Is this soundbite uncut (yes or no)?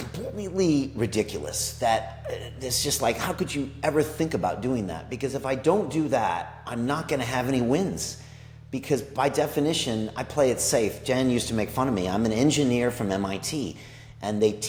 yes